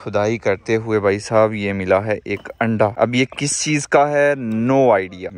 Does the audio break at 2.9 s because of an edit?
no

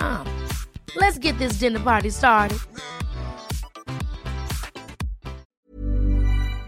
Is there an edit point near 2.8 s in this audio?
no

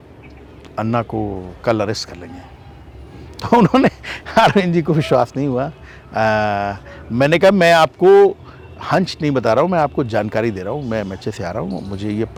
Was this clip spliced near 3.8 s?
no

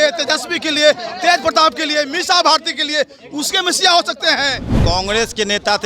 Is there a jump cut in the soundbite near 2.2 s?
no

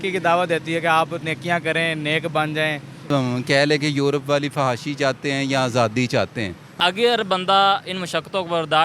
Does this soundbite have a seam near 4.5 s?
no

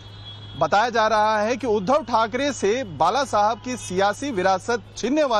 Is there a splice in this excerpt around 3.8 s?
yes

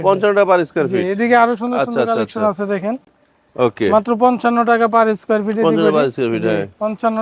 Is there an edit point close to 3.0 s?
no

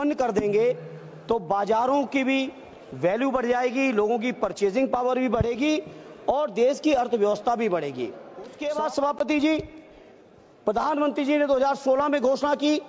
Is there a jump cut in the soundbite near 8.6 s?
yes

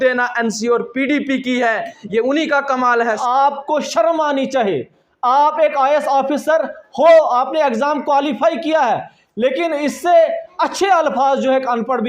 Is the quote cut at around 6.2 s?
no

